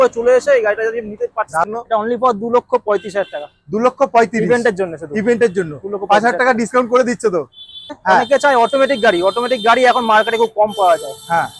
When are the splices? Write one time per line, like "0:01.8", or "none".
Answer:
0:01.7
0:08.0